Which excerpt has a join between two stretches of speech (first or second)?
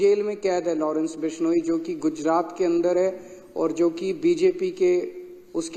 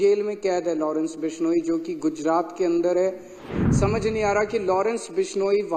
second